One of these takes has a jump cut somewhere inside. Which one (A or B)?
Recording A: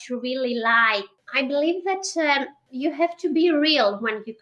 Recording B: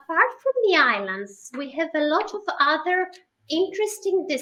A